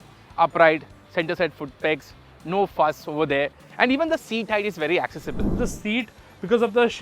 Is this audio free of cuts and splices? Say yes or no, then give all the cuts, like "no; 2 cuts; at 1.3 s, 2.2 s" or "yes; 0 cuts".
no; 1 cut; at 5.6 s